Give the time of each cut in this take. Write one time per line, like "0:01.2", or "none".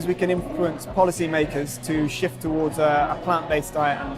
none